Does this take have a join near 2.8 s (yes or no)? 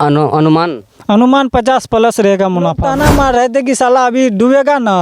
yes